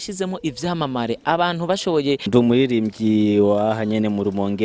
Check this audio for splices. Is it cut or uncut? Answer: cut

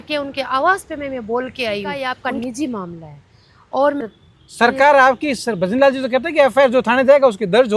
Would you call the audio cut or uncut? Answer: cut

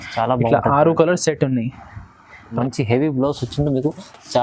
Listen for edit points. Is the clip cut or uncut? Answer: cut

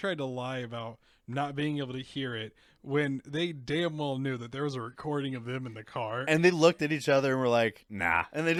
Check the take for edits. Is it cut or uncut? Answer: uncut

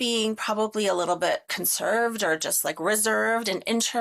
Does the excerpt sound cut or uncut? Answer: cut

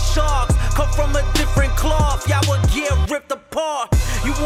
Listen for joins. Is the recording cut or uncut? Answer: uncut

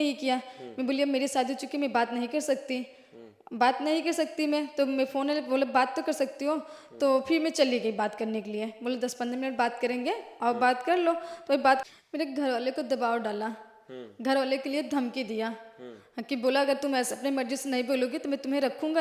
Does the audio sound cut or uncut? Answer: cut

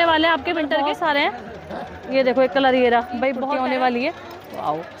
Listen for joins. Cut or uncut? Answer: cut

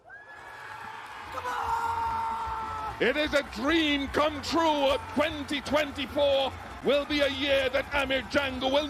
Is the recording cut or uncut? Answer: uncut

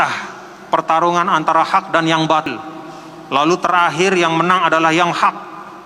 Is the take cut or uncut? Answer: cut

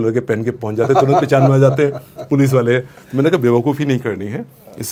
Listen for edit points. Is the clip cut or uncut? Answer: uncut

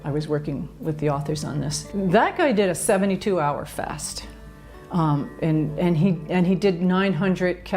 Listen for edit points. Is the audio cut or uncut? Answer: cut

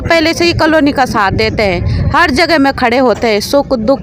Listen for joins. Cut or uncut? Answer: uncut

